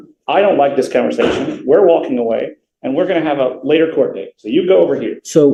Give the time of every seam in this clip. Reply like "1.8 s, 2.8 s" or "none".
none